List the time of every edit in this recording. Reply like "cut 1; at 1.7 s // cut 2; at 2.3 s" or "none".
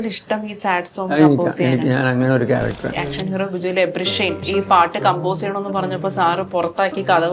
cut 1; at 2.9 s // cut 2; at 4.5 s